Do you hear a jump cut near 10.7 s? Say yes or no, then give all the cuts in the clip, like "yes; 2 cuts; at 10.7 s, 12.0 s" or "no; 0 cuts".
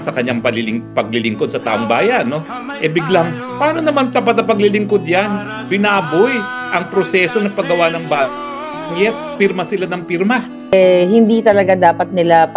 yes; 1 cut; at 10.7 s